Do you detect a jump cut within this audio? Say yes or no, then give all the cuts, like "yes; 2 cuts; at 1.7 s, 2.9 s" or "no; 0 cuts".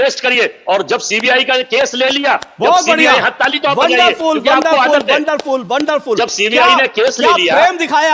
no; 0 cuts